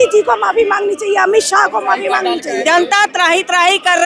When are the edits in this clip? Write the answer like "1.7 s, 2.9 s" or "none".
2.6 s